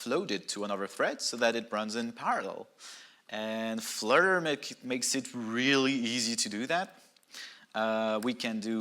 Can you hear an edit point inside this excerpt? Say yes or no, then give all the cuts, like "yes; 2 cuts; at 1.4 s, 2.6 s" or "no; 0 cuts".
no; 0 cuts